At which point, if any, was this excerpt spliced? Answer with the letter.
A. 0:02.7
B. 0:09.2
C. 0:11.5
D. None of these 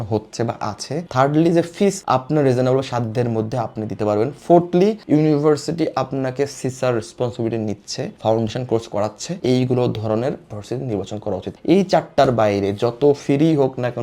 D